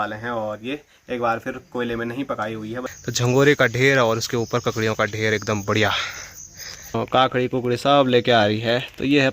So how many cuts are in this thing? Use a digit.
2